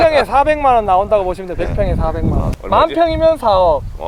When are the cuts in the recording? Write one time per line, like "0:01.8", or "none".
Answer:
none